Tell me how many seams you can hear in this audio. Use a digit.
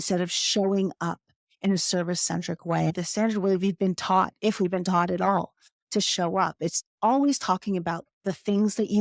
1